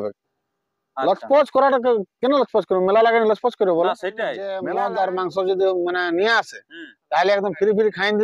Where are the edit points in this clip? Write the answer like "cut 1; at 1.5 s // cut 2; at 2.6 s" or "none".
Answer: cut 1; at 4.6 s

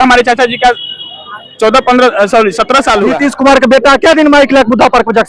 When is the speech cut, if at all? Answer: cut 1; at 3.1 s

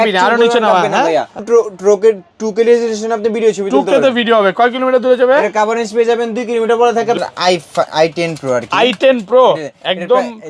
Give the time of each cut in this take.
cut 1; at 1.4 s // cut 2; at 7.2 s

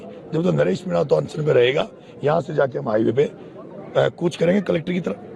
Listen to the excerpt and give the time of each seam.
none

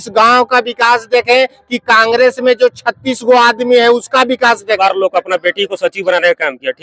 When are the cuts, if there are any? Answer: cut 1; at 4.8 s

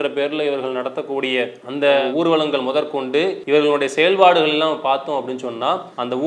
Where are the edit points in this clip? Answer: cut 1; at 3.4 s

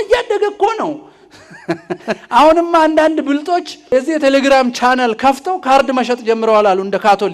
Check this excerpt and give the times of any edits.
cut 1; at 2.2 s // cut 2; at 3.9 s

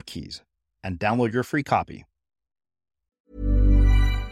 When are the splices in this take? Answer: cut 1; at 3.2 s

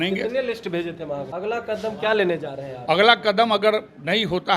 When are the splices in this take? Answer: cut 1; at 1.3 s

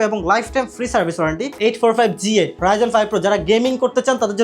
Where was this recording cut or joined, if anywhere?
cut 1; at 1.5 s

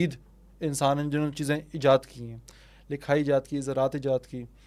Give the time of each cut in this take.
none

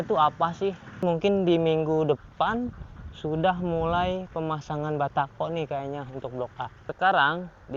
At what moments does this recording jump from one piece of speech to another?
cut 1; at 1.0 s // cut 2; at 6.8 s

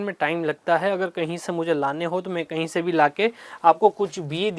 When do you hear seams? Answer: none

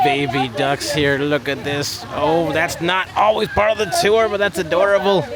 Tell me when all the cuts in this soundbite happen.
none

